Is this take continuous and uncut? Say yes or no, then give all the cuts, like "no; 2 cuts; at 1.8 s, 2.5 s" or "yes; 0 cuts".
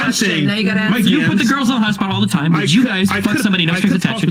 yes; 0 cuts